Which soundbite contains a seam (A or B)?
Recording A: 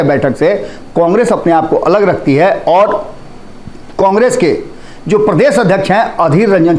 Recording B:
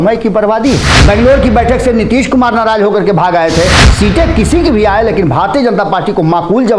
B